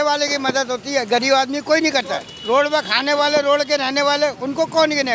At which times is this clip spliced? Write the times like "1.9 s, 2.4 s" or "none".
2.3 s